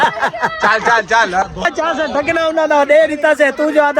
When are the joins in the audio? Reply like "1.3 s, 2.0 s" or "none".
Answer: 1.7 s

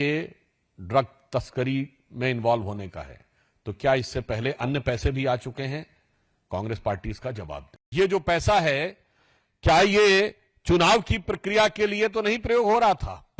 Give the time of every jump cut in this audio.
7.8 s

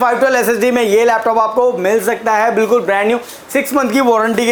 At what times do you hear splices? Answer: none

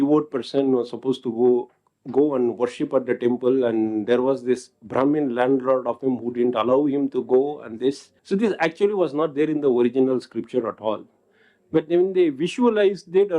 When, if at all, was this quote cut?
8.1 s

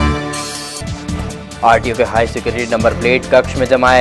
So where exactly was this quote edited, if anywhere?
1.0 s

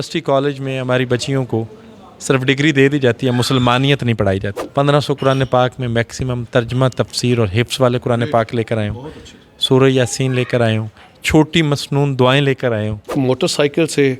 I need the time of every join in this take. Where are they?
4.6 s, 13.1 s

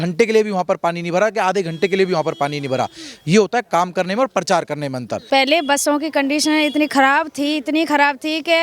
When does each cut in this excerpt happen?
5.2 s

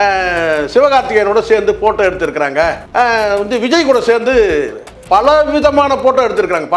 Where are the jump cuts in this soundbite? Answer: none

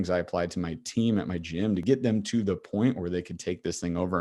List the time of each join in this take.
1.8 s

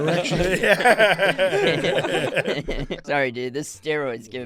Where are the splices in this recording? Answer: 3.0 s

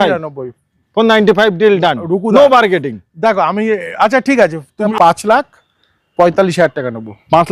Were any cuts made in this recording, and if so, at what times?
4.9 s

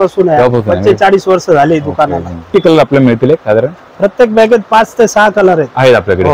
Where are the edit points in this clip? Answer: 2.4 s

